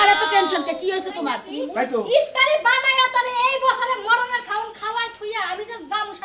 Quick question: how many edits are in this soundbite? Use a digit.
1